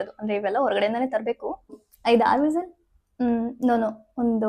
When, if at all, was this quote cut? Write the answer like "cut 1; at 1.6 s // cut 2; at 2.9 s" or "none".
cut 1; at 1.9 s